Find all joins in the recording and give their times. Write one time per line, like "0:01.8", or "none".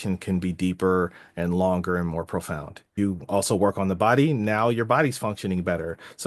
0:02.8